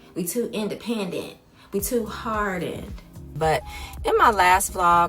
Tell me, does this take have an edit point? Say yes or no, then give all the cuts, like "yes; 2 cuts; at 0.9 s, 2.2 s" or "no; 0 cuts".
yes; 1 cut; at 3.2 s